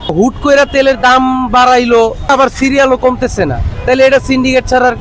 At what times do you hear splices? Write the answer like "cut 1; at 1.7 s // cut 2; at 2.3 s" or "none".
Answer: cut 1; at 2.3 s // cut 2; at 3.7 s